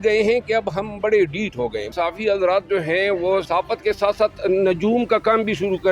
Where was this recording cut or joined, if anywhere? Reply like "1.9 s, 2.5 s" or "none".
1.9 s, 3.5 s